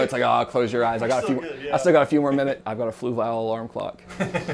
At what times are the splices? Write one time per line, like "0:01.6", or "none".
0:02.7